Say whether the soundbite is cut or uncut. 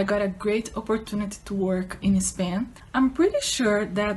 cut